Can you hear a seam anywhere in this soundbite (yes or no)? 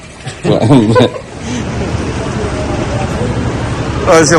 yes